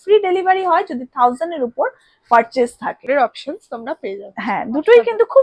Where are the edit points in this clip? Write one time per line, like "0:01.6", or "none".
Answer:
0:03.0